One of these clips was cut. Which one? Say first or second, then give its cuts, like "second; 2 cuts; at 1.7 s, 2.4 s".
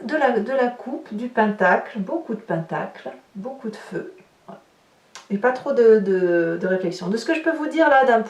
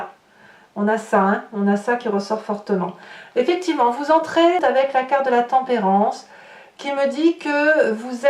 second; 1 cut; at 4.6 s